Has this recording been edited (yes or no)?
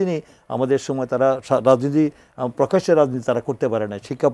no